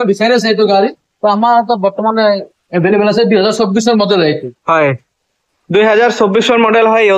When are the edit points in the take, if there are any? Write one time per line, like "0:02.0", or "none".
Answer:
none